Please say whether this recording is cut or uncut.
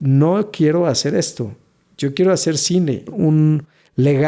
cut